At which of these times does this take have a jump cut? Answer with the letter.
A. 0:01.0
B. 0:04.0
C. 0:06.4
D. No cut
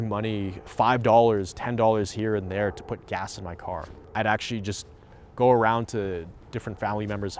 B